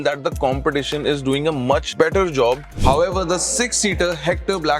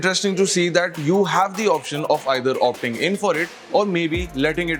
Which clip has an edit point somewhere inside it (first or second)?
first